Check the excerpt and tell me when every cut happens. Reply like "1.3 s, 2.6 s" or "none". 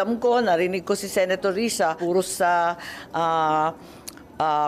2.0 s